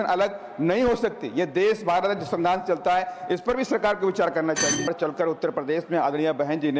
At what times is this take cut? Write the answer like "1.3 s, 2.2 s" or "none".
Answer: 4.9 s